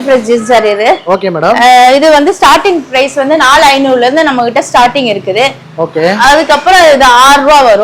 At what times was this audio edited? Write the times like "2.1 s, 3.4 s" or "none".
none